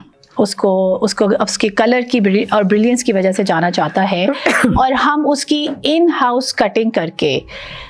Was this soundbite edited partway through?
no; 0 cuts

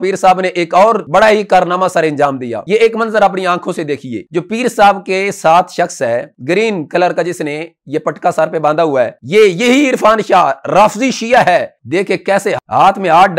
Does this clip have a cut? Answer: yes; 3 cuts; at 1.0 s, 2.5 s, 4.2 s

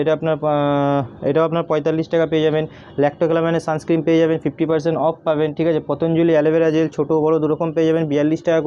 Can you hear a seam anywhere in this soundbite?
no; 0 cuts

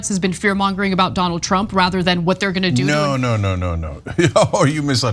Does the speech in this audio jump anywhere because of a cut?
yes; 1 cut; at 3.6 s

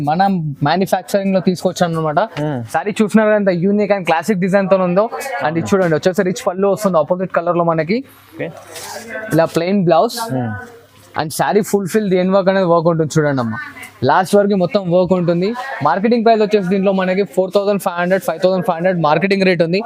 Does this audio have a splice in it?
no; 0 cuts

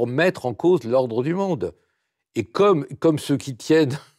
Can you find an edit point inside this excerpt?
no; 0 cuts

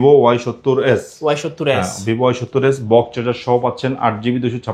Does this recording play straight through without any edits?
yes; 0 cuts

